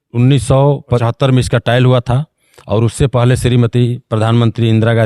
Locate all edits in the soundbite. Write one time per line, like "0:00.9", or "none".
0:01.0